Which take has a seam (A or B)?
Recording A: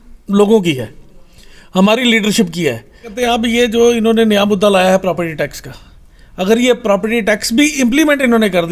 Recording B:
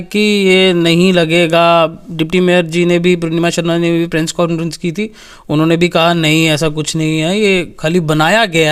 A